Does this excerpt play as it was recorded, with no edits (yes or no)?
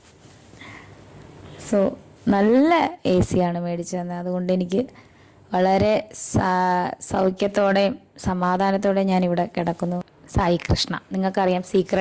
no